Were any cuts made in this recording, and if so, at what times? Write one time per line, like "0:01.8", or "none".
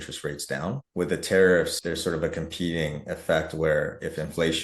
0:00.8
0:01.8